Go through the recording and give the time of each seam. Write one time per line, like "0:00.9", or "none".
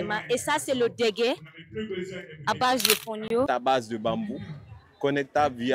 0:03.5

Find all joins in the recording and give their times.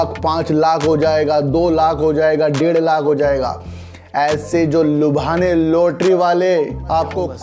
none

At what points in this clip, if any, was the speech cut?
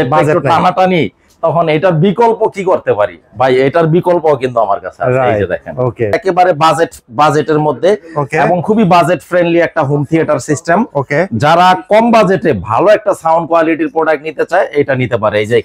0:06.2

